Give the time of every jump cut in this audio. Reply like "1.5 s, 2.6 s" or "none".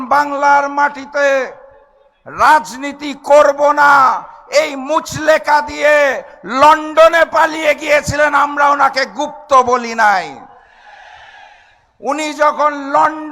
none

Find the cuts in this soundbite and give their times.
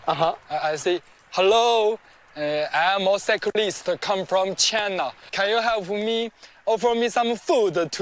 none

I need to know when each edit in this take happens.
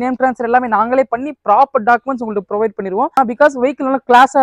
3.1 s

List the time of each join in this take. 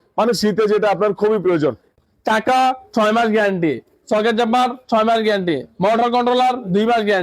1.9 s

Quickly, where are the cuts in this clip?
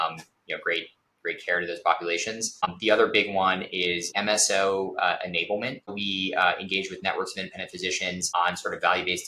2.5 s, 4.1 s, 5.9 s

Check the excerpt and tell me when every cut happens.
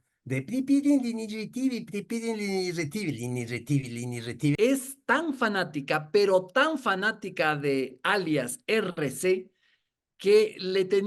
4.6 s

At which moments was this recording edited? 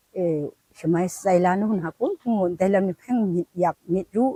none

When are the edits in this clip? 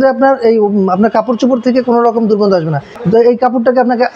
2.9 s

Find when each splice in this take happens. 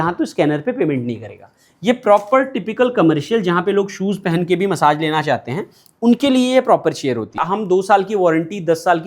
7.4 s

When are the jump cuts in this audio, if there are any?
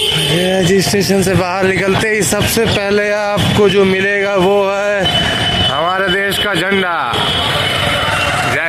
none

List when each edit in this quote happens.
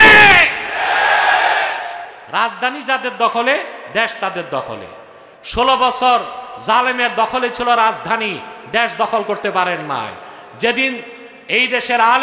2.1 s

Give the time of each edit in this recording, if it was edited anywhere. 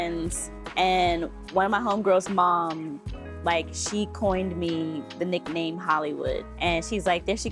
6.5 s

